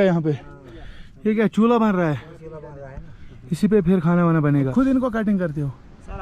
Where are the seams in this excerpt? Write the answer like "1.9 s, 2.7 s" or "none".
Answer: 4.6 s